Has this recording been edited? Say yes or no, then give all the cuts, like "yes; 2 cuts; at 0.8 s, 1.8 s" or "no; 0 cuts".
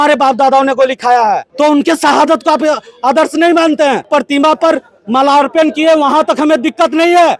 yes; 2 cuts; at 1.5 s, 4.1 s